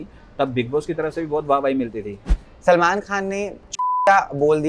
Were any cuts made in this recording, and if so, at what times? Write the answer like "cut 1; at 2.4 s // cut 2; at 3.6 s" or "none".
cut 1; at 2.5 s // cut 2; at 3.6 s